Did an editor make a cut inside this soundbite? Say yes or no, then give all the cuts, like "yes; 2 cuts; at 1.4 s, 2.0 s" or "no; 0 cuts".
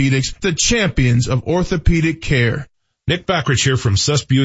yes; 1 cut; at 2.8 s